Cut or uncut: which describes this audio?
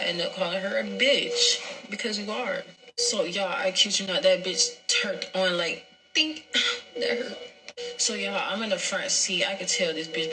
uncut